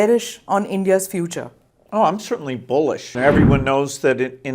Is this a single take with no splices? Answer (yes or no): no